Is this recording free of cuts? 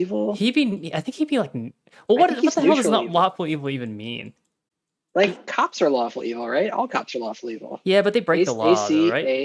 yes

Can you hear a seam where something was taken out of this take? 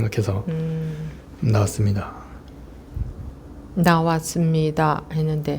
yes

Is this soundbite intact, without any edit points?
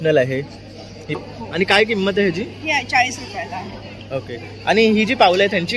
no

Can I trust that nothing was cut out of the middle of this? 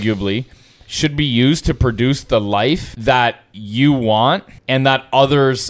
no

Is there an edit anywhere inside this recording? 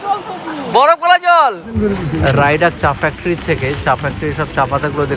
yes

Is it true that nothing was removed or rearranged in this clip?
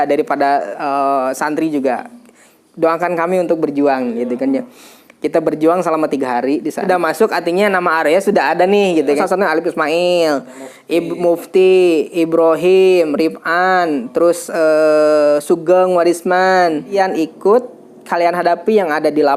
no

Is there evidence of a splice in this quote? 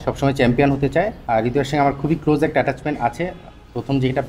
yes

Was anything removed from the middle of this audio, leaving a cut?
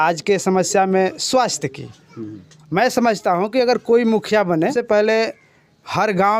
yes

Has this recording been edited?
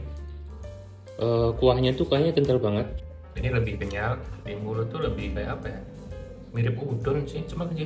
yes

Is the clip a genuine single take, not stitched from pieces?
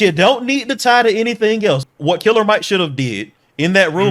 no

